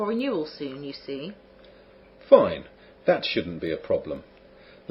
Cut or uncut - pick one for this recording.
uncut